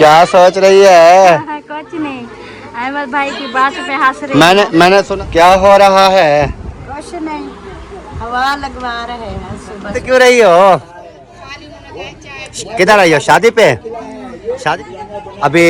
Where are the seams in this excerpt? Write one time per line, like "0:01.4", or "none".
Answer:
0:05.1
0:10.0
0:14.6